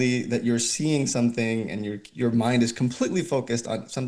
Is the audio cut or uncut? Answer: uncut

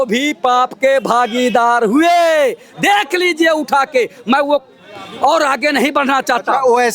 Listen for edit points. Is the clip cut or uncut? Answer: uncut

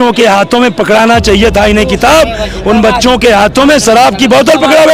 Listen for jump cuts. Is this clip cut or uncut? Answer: uncut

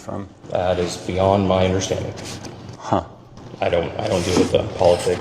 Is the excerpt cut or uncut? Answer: uncut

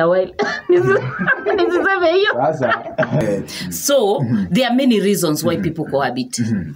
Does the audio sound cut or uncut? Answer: cut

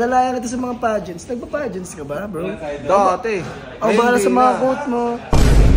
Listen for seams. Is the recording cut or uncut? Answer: uncut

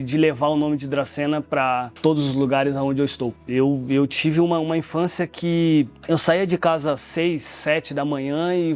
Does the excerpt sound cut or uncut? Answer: cut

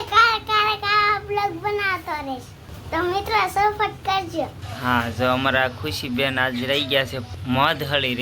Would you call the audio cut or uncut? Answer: cut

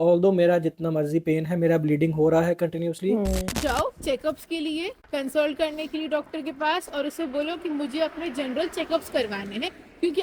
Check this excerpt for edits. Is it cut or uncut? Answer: cut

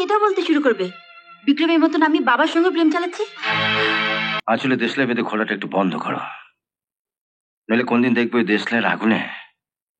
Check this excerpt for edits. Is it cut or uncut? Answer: cut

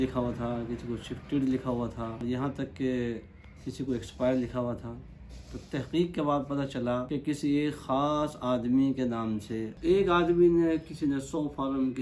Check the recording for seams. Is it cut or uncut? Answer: cut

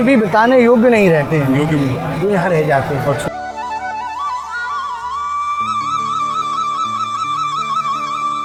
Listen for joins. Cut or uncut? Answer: uncut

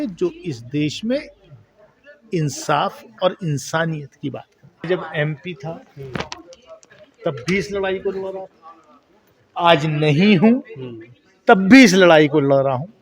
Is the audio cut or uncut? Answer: cut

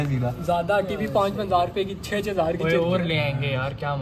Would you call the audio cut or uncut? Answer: uncut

